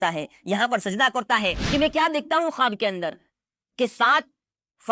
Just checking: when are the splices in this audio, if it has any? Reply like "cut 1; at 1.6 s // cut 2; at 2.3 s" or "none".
cut 1; at 1.6 s